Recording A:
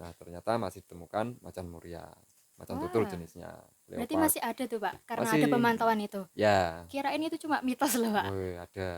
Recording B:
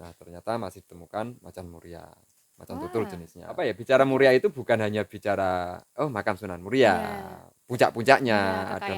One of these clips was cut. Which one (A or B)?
B